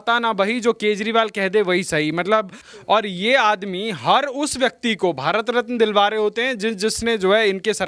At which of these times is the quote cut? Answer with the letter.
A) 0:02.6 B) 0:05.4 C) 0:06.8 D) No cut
A